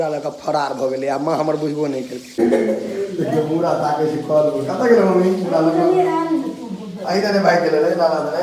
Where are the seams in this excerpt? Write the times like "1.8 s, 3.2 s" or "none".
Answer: 2.2 s